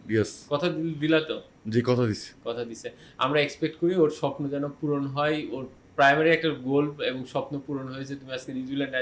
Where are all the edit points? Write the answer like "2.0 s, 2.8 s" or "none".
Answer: none